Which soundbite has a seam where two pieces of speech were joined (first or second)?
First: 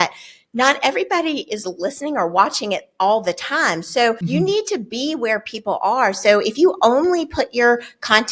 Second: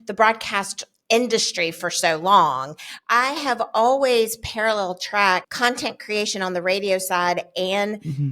first